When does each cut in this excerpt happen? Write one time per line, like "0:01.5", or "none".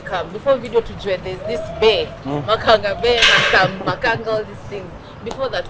none